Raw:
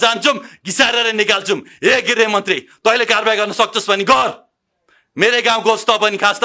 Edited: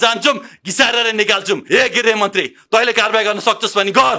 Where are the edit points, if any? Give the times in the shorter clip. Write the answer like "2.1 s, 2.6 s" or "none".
1.6 s